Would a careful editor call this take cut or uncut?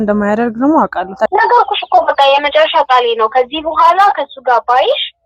cut